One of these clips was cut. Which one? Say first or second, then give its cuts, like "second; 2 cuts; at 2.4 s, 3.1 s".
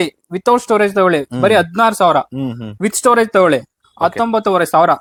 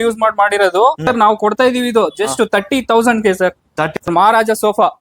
second; 2 cuts; at 1.1 s, 3.9 s